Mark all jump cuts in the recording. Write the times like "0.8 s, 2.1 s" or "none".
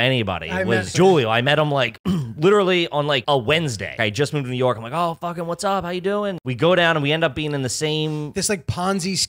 0.9 s, 3.2 s, 4.0 s, 6.4 s